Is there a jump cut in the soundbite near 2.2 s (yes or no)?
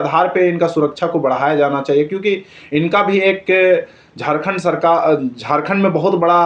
no